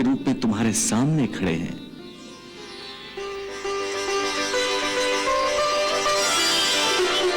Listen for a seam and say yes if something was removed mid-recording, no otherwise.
yes